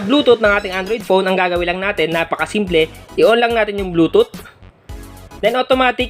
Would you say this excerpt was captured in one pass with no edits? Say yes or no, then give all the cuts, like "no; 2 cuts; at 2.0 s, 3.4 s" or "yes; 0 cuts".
yes; 0 cuts